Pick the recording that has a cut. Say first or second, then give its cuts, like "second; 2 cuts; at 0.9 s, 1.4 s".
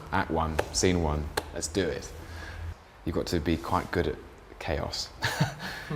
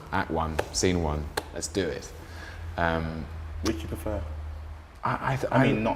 first; 1 cut; at 2.6 s